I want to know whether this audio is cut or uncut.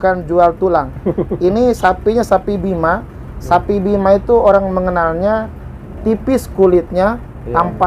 uncut